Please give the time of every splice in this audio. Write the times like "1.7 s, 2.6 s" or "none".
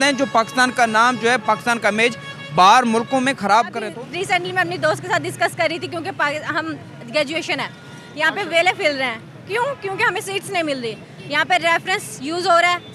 3.8 s